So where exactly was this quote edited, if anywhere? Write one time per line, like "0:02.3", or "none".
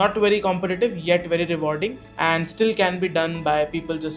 none